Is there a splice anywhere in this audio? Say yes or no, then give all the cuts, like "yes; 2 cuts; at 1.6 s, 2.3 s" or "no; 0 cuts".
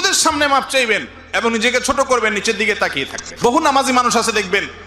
yes; 1 cut; at 3.3 s